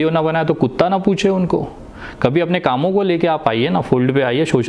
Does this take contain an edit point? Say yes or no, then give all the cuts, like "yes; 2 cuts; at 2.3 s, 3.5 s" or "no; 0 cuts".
no; 0 cuts